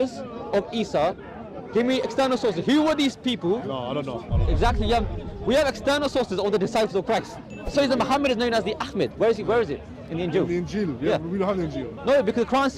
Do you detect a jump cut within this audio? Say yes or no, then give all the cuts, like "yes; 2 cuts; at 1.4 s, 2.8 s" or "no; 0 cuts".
yes; 1 cut; at 7.7 s